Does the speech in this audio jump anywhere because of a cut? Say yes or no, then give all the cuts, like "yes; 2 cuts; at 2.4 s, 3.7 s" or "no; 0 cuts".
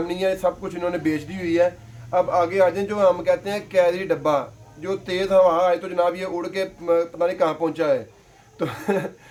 no; 0 cuts